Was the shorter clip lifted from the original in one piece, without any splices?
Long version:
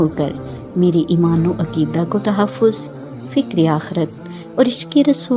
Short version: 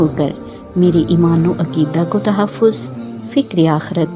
yes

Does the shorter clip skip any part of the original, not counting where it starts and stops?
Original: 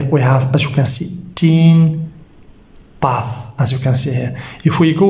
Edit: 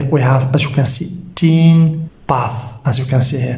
yes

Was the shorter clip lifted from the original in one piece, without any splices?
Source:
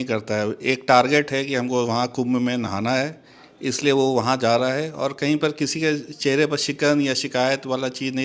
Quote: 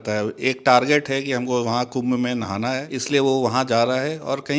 no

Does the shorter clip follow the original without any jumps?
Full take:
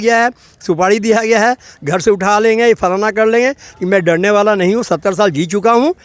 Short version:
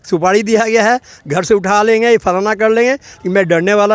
yes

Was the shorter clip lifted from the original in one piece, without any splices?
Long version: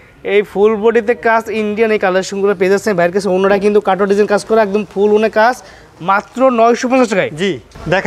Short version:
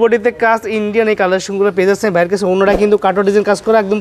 yes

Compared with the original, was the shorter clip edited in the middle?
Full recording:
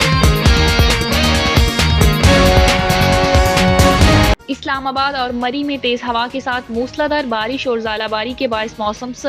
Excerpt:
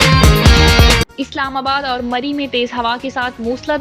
yes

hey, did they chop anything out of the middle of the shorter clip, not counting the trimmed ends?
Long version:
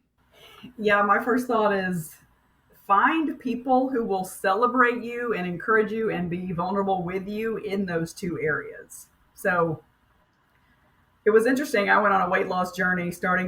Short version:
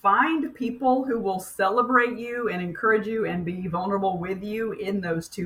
no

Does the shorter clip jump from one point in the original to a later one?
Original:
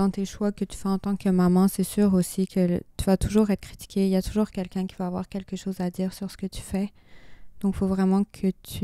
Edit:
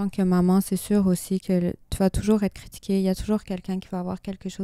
no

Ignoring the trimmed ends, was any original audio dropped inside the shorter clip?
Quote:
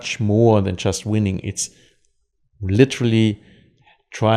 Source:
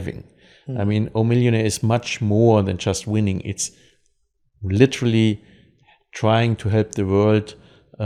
no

